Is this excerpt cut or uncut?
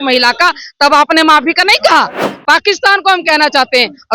cut